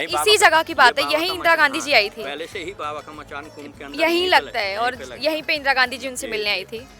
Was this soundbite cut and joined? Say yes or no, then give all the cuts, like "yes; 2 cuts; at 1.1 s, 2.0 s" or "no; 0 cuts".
no; 0 cuts